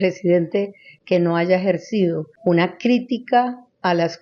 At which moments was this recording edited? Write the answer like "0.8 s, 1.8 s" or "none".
2.3 s